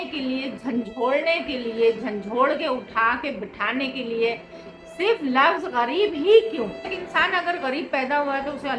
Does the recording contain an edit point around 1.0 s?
no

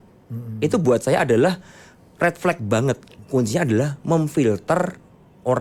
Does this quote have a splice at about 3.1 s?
yes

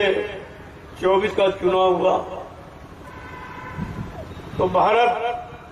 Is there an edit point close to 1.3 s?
yes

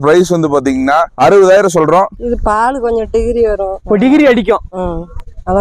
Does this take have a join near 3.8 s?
yes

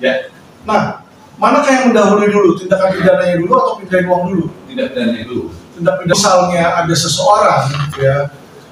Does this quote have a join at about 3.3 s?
no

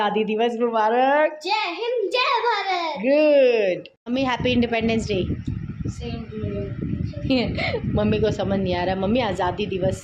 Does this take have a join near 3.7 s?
yes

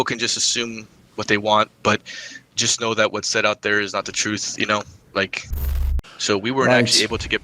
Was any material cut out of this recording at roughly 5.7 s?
yes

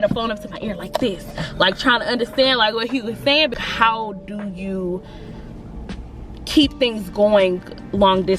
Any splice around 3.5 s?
yes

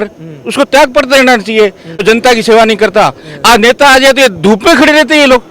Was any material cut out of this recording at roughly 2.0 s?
yes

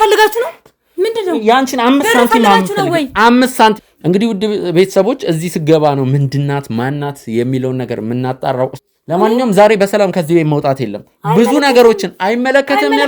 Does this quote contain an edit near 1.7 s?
no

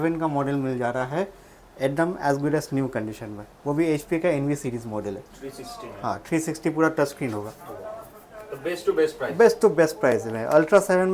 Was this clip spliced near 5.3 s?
no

